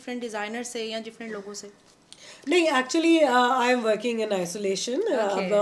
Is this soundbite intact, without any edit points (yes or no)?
yes